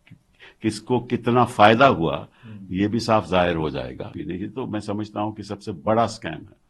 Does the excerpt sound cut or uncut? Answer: cut